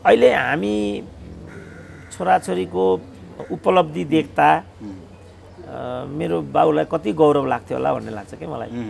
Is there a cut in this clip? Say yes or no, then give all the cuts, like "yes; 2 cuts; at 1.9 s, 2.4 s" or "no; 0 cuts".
yes; 1 cut; at 3.4 s